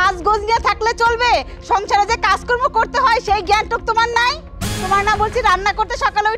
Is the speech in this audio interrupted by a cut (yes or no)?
no